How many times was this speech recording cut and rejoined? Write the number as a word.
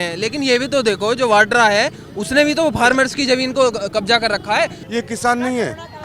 one